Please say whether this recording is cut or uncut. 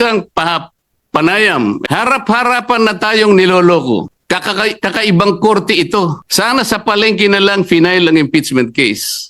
cut